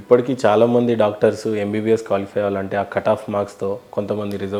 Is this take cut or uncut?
uncut